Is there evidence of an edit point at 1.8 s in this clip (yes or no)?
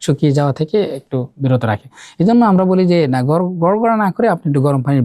no